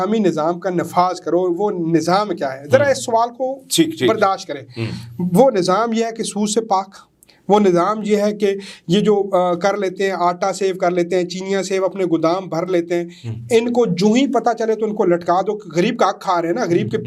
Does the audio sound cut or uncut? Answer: uncut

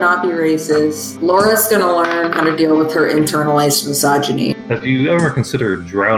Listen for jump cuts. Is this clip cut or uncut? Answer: cut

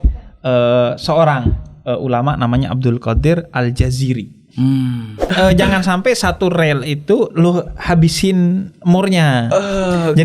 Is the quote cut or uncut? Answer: cut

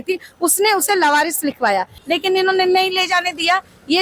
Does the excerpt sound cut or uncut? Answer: cut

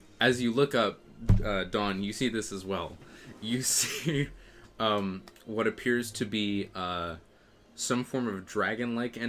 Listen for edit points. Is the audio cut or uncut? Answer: uncut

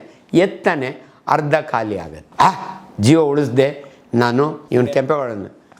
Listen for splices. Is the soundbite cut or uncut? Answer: cut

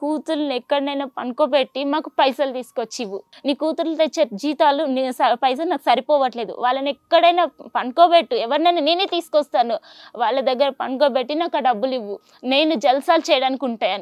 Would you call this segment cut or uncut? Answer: cut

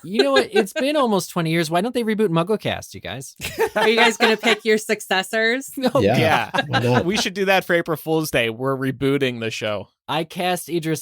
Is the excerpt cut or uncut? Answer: cut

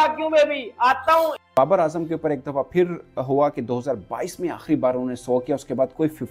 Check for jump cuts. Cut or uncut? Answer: cut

